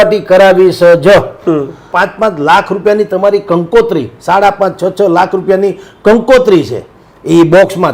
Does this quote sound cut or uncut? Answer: cut